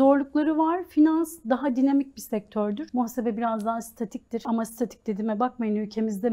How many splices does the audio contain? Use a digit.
2